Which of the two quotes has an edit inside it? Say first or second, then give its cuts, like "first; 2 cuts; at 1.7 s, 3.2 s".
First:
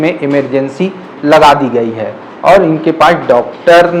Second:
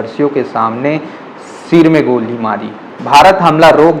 second; 1 cut; at 3.0 s